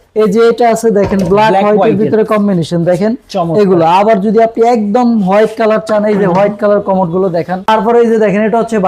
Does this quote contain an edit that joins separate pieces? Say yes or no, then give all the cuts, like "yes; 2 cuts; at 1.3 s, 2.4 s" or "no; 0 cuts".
yes; 1 cut; at 7.6 s